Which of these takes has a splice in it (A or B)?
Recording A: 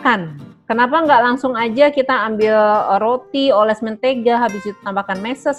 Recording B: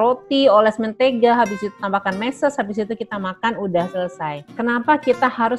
B